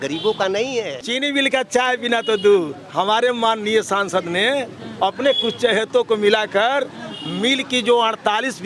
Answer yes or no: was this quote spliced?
yes